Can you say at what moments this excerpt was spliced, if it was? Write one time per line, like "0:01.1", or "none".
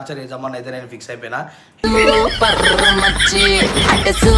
none